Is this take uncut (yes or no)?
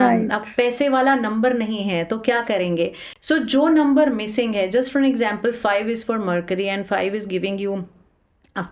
yes